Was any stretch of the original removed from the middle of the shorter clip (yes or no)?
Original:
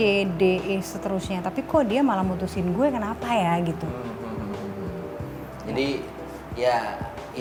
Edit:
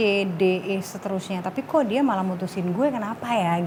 no